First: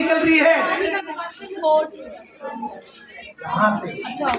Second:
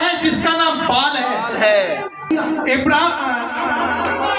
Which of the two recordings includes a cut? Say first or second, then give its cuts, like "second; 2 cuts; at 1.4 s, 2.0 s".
second; 1 cut; at 2.3 s